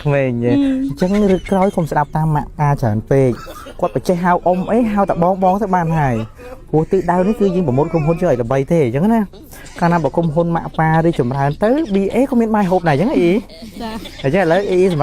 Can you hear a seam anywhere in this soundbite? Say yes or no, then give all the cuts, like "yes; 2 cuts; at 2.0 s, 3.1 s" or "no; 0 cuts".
no; 0 cuts